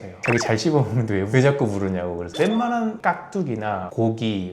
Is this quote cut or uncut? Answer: cut